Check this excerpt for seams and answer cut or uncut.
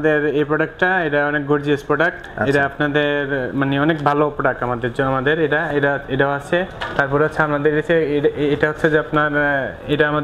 uncut